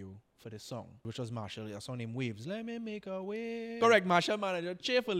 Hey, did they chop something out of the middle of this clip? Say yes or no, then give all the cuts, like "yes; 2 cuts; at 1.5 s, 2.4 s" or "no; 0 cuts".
yes; 2 cuts; at 1.0 s, 3.7 s